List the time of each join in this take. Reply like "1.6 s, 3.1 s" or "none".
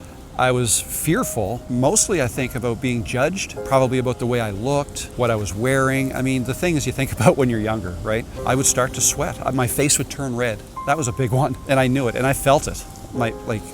1.6 s, 3.5 s, 5.0 s, 8.3 s, 11.6 s